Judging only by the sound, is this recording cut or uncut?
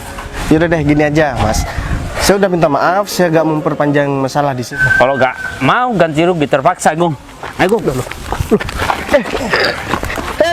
cut